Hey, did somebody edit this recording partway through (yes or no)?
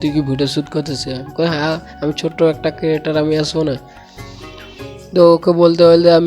no